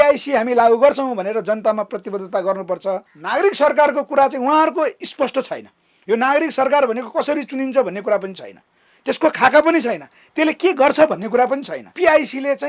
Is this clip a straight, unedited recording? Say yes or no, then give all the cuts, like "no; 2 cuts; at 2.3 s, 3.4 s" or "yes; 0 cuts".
no; 2 cuts; at 3.1 s, 11.8 s